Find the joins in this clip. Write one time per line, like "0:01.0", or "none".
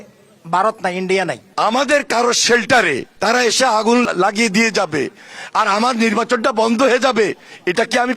0:01.4
0:03.1
0:04.0